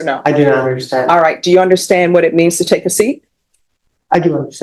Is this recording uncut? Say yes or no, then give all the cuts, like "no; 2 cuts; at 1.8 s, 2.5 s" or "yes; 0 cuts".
yes; 0 cuts